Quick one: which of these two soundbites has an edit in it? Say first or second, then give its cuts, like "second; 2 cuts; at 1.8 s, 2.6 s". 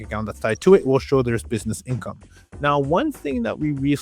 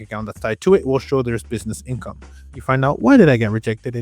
second; 1 cut; at 2.6 s